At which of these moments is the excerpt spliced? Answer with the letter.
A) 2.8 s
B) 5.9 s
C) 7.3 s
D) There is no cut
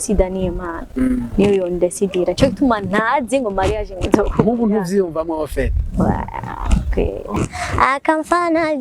C